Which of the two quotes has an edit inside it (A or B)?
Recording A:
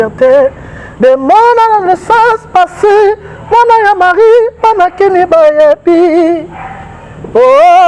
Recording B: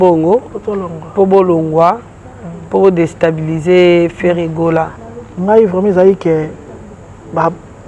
B